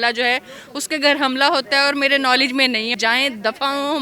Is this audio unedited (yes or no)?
no